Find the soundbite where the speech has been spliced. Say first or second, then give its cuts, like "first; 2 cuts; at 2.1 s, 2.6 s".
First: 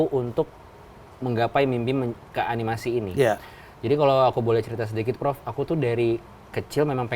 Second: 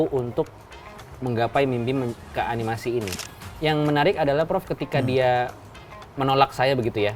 second; 1 cut; at 3.1 s